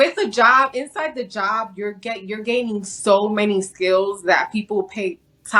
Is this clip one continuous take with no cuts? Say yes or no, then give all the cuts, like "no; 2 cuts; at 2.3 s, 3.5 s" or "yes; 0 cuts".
yes; 0 cuts